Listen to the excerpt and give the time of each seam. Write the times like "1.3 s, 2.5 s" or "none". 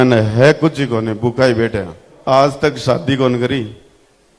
2.1 s